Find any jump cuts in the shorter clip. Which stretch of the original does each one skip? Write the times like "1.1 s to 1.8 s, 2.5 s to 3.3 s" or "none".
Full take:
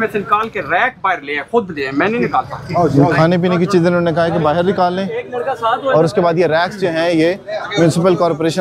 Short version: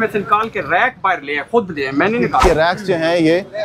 2.4 s to 6.4 s